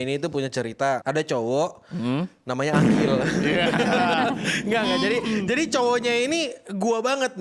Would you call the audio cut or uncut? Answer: cut